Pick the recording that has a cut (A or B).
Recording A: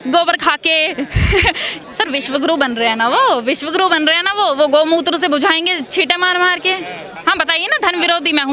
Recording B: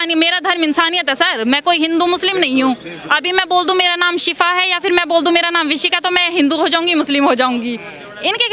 A